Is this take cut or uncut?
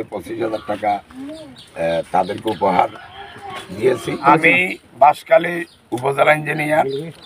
cut